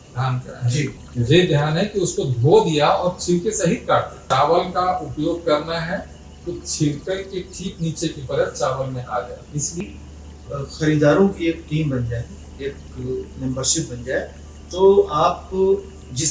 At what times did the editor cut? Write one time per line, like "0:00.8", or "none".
0:01.0
0:04.2
0:09.8